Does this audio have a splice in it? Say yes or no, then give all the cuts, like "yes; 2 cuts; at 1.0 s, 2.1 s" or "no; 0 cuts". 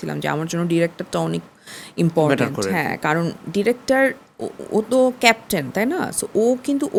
no; 0 cuts